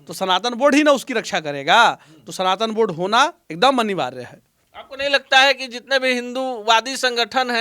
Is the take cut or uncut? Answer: uncut